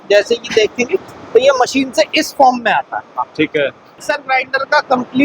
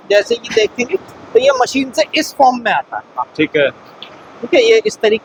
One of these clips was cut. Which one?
first; 1 cut; at 4.1 s

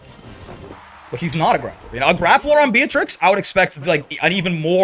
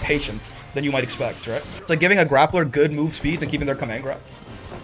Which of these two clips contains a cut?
second; 1 cut; at 1.7 s

